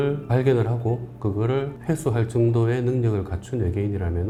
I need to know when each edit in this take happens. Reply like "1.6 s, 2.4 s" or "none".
none